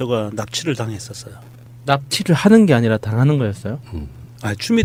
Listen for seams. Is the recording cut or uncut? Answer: uncut